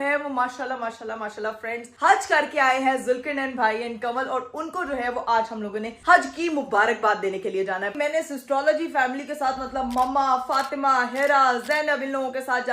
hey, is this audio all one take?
no; 1 cut; at 7.9 s

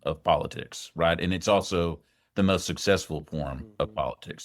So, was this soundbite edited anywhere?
no; 0 cuts

